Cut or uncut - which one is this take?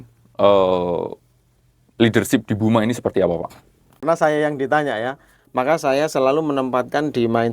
cut